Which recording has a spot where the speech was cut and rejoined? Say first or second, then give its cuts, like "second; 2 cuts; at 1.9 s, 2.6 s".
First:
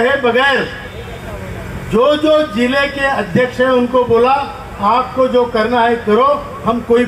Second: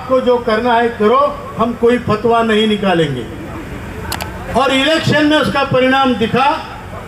second; 1 cut; at 4.4 s